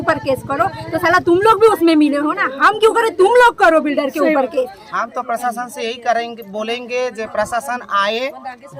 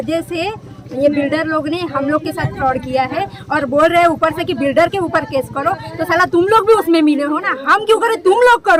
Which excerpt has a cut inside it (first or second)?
first